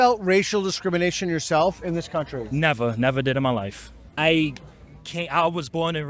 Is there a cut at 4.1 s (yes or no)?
yes